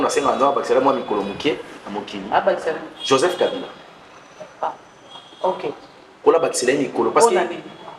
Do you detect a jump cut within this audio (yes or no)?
no